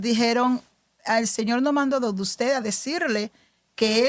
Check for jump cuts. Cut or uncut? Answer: uncut